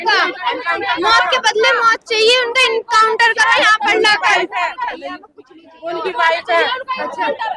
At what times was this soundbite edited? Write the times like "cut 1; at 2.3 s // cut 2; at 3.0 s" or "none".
none